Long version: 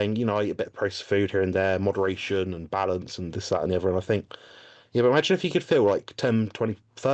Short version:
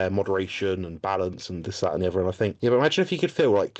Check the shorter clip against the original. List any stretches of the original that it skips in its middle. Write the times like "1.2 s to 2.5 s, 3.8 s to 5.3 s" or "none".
4.2 s to 4.9 s

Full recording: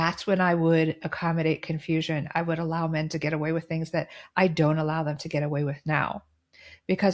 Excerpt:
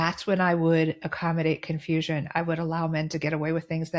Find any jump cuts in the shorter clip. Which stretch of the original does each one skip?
none

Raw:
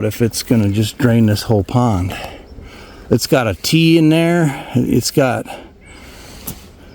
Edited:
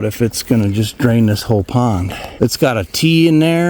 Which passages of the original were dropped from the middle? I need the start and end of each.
2.2 s to 2.9 s

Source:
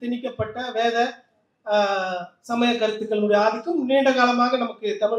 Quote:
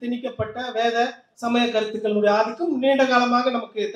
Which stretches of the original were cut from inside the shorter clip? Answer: 1.3 s to 2.3 s

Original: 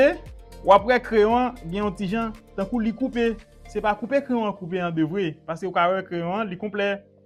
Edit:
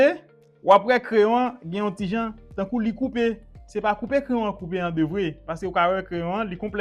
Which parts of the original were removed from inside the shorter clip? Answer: none

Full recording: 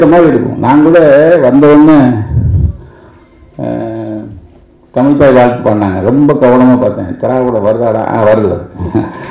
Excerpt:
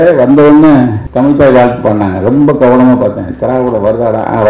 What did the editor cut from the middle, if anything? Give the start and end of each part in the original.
2.3 s to 4.8 s

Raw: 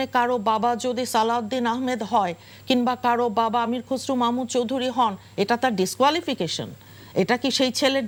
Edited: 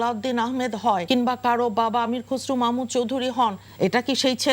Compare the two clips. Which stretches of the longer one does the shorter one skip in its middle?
2.3 s to 2.6 s, 5.2 s to 7.0 s

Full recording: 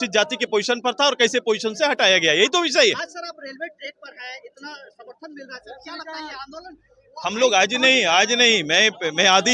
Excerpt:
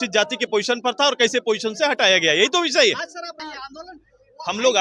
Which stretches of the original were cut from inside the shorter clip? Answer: 3.4 s to 6.2 s

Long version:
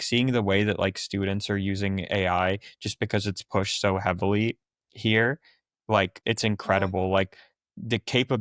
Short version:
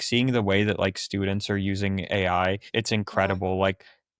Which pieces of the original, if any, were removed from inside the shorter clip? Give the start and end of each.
2.6 s to 6.2 s

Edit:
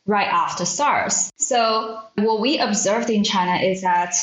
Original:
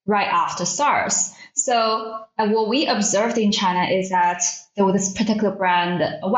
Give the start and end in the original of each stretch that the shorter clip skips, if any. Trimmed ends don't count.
1.3 s to 1.4 s, 2.3 s to 2.5 s

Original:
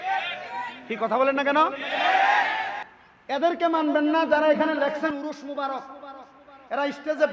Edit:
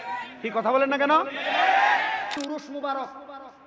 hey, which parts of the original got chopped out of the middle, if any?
2.9 s to 5.2 s

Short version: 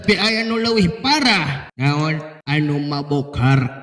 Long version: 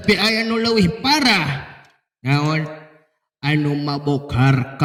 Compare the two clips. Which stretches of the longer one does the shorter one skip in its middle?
1.6 s to 2.1 s, 2.8 s to 3.3 s

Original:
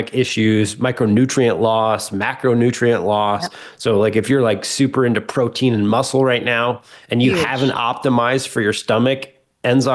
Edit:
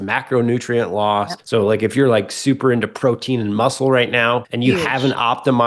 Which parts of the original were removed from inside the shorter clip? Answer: 3.5 s to 3.7 s, 6.8 s to 7.1 s

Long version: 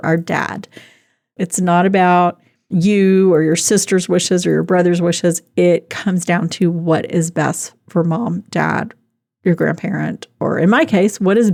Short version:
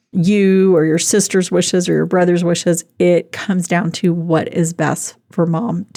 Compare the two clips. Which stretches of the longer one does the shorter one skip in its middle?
none

